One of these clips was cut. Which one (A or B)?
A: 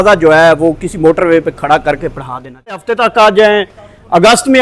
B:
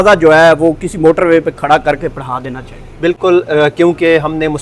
A